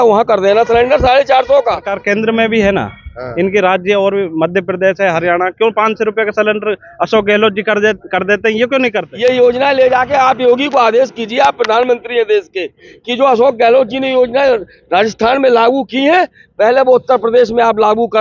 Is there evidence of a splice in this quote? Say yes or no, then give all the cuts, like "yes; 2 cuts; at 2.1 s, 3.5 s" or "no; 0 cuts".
yes; 2 cuts; at 1.9 s, 9.1 s